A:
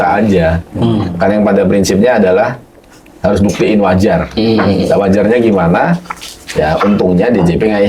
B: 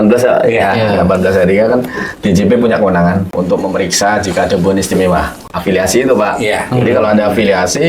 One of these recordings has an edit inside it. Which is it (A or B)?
B